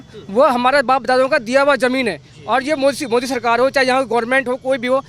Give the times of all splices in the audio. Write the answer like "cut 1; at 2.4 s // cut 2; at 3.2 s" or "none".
none